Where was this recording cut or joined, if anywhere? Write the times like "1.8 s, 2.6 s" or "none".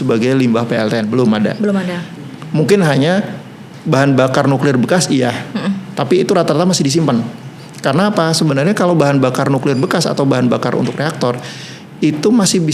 none